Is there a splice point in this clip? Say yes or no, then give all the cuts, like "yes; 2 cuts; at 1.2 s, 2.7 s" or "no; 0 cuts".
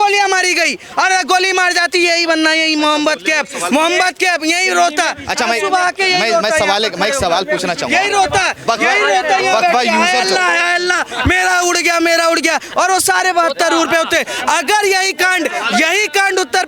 no; 0 cuts